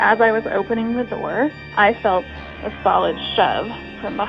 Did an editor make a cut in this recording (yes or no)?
yes